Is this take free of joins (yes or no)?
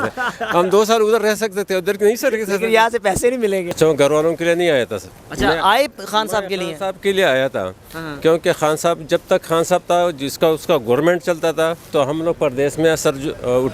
no